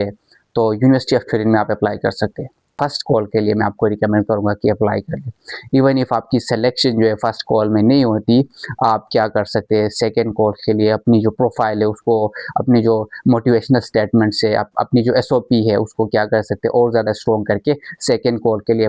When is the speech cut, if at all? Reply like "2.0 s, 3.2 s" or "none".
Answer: 2.7 s